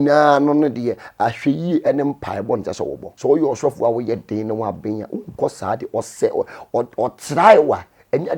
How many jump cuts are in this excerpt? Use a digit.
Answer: 1